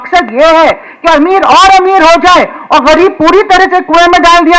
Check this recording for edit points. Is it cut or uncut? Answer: uncut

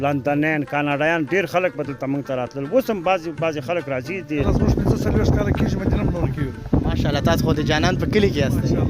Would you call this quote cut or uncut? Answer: cut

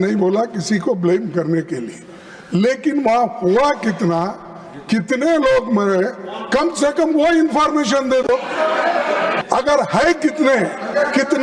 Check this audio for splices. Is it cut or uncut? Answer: cut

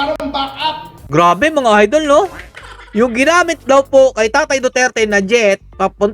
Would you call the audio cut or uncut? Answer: uncut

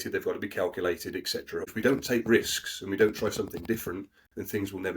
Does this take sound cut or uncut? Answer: cut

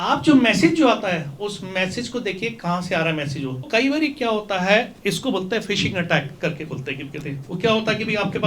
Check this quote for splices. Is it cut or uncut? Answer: cut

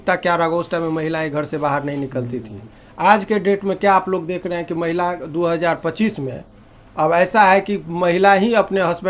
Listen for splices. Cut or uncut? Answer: uncut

